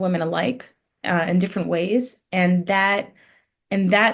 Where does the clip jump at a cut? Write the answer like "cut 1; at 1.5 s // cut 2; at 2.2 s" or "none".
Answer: none

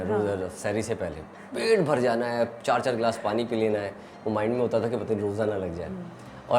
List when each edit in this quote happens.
none

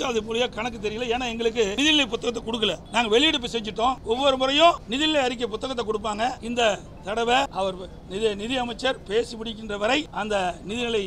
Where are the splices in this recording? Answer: cut 1; at 1.7 s // cut 2; at 2.8 s // cut 3; at 4.0 s // cut 4; at 4.9 s // cut 5; at 6.4 s // cut 6; at 7.5 s // cut 7; at 10.1 s

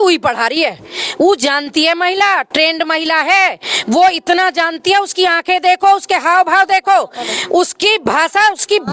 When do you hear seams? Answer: none

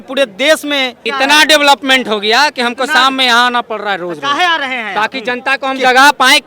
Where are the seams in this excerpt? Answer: cut 1; at 1.0 s

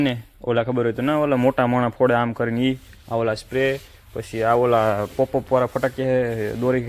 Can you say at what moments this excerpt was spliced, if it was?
none

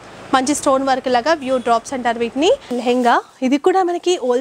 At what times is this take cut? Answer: cut 1; at 2.8 s

